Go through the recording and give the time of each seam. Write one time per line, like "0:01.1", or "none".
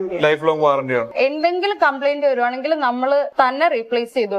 0:01.1
0:03.3